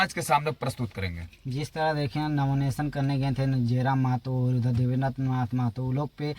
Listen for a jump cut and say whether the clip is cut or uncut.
uncut